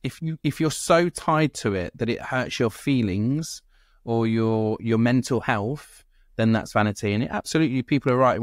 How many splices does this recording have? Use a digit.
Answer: 0